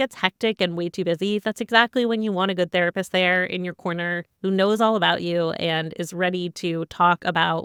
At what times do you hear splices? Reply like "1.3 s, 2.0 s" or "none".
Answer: none